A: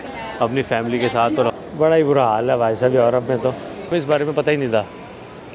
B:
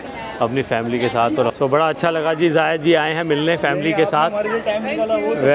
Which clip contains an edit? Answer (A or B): A